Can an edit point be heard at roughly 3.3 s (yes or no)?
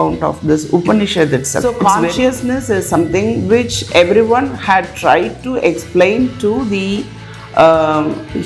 no